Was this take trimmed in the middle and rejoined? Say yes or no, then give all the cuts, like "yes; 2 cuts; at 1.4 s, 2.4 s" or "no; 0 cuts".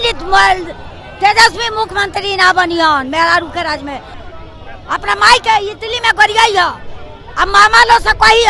yes; 1 cut; at 4.1 s